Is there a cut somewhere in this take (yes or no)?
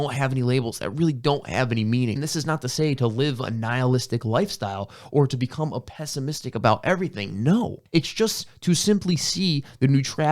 yes